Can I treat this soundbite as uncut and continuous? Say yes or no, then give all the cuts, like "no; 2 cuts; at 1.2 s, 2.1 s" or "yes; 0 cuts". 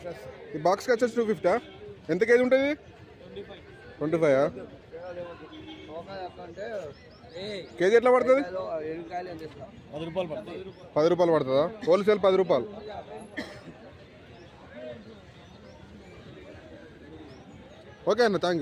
yes; 0 cuts